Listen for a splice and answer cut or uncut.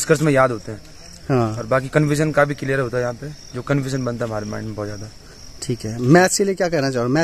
uncut